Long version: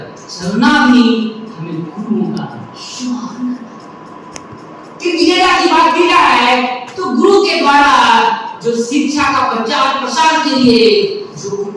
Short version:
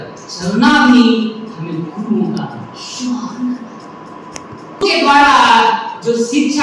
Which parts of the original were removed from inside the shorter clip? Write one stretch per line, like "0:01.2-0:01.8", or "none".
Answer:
0:04.8-0:07.4